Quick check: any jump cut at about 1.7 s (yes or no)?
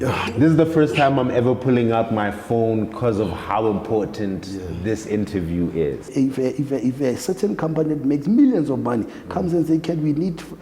no